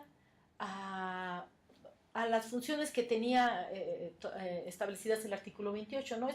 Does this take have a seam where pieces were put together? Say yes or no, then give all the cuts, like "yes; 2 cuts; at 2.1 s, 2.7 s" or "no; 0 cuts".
yes; 1 cut; at 2.3 s